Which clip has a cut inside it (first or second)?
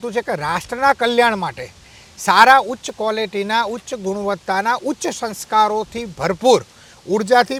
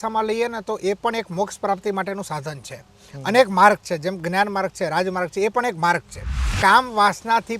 second